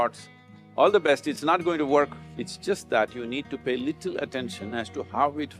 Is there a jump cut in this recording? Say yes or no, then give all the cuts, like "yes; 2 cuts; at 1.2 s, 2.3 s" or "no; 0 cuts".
yes; 1 cut; at 2.2 s